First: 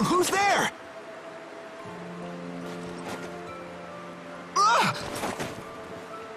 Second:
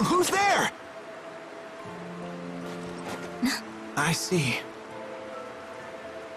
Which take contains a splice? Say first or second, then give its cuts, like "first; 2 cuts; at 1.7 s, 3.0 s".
first; 1 cut; at 3.4 s